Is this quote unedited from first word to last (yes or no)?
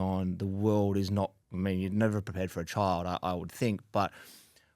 no